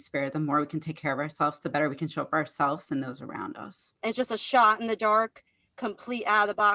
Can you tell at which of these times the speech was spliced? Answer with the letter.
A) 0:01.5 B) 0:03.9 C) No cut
B